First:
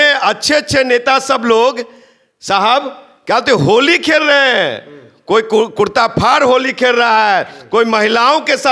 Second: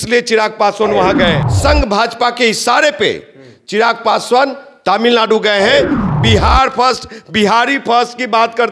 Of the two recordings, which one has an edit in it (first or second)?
second